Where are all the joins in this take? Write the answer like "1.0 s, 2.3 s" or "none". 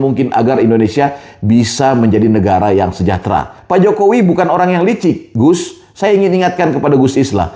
3.6 s